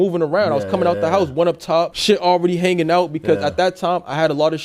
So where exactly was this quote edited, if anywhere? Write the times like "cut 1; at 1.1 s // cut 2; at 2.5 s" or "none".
cut 1; at 2.0 s

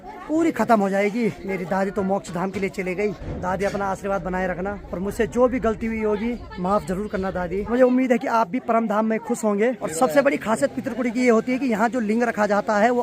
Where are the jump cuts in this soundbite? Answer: cut 1; at 1.4 s // cut 2; at 3.3 s // cut 3; at 4.8 s // cut 4; at 6.5 s // cut 5; at 7.7 s // cut 6; at 9.9 s

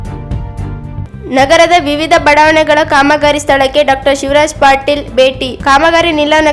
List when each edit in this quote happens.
cut 1; at 1.1 s

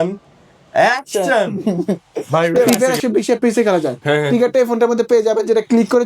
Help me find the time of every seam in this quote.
cut 1; at 2.7 s

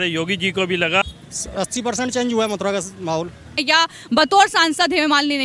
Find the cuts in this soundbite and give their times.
cut 1; at 1.0 s // cut 2; at 3.6 s

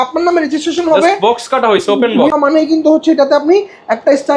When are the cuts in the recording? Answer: cut 1; at 2.3 s

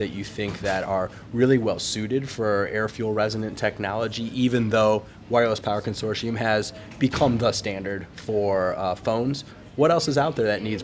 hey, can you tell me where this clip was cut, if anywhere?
none

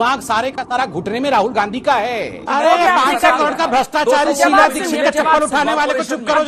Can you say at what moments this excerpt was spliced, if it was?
cut 1; at 2.4 s

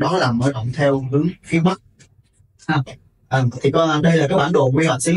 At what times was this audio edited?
none

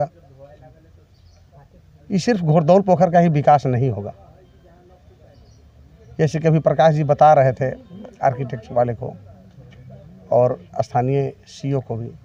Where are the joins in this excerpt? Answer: none

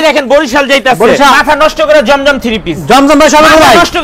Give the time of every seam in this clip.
cut 1; at 1.3 s

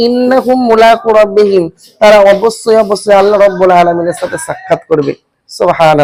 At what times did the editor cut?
none

